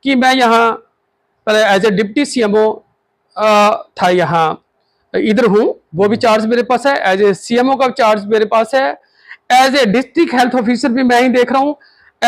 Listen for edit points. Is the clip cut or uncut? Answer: uncut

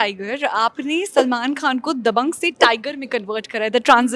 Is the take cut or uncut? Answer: uncut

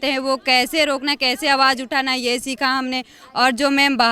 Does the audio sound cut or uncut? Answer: uncut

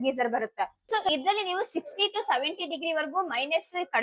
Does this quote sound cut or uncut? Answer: cut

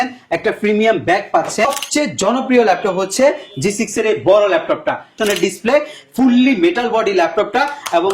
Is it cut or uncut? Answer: cut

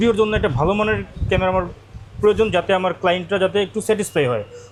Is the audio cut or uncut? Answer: uncut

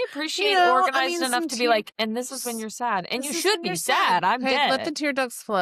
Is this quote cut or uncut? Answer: uncut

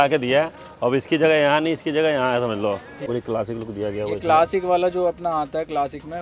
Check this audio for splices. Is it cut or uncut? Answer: cut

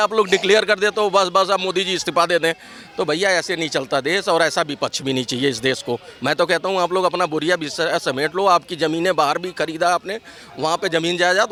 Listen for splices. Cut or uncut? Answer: uncut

